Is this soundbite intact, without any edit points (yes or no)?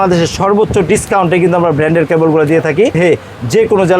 no